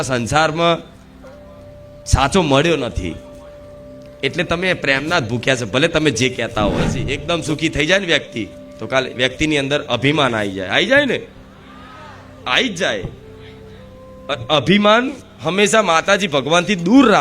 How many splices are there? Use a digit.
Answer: 1